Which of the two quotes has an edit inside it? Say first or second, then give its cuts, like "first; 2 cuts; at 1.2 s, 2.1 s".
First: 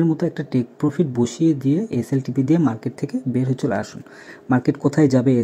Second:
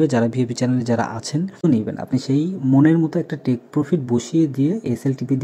second; 1 cut; at 1.6 s